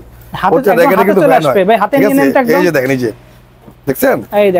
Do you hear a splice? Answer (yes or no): no